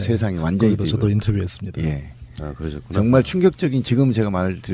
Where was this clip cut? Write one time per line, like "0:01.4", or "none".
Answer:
0:03.7

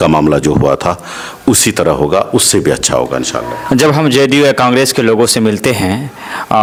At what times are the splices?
none

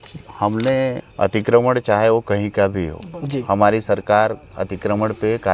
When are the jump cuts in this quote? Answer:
0:01.1

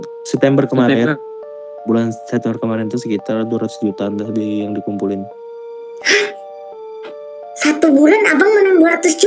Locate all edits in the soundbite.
none

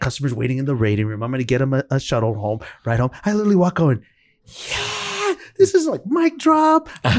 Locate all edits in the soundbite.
none

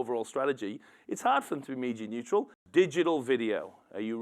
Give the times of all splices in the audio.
0:02.6

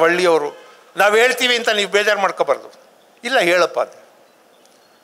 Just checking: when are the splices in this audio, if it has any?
none

